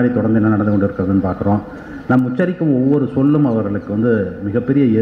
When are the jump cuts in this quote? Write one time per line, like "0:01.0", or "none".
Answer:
none